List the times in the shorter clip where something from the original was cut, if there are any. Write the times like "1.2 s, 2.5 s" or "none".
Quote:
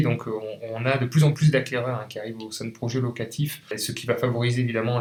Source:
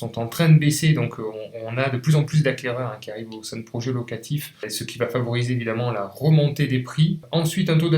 none